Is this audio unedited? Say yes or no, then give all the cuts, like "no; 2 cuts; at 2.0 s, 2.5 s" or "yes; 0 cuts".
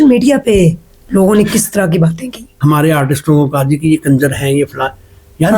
no; 1 cut; at 2.5 s